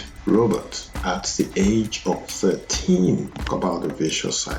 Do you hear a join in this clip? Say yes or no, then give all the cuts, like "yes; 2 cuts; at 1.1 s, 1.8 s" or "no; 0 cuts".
yes; 1 cut; at 3.4 s